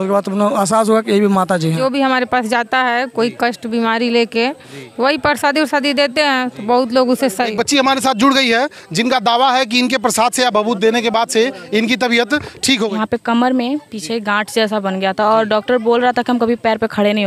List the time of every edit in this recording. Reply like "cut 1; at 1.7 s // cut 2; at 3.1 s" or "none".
cut 1; at 1.8 s // cut 2; at 7.5 s // cut 3; at 12.9 s